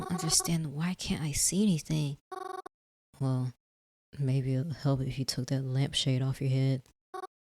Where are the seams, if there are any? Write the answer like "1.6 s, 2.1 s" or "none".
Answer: 2.7 s